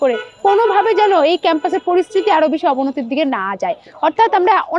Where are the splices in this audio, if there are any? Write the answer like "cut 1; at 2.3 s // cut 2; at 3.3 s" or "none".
none